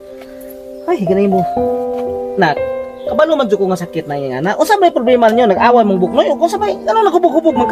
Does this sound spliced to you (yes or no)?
no